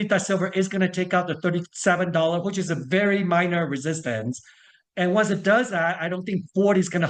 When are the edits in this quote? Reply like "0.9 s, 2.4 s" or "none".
none